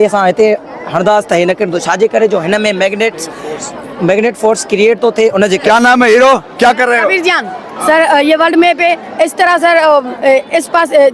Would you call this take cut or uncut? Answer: cut